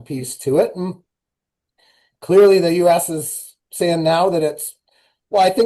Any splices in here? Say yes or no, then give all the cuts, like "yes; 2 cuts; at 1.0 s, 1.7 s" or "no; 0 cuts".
no; 0 cuts